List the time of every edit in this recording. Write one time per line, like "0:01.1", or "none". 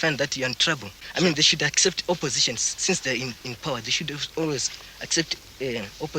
0:00.9